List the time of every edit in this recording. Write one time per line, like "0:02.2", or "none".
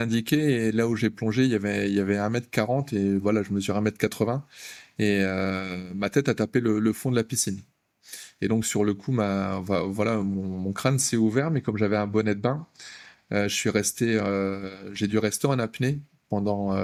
none

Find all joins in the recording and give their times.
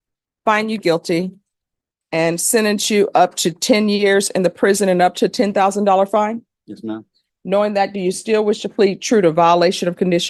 none

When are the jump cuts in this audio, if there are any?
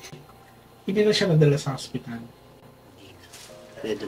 none

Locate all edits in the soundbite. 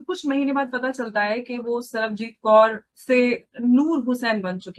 none

